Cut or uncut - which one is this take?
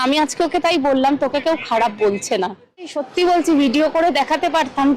cut